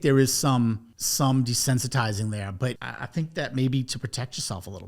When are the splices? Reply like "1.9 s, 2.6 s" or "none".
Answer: 1.0 s, 2.9 s